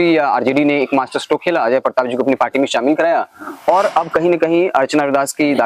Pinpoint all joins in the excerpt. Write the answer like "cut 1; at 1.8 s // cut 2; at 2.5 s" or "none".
none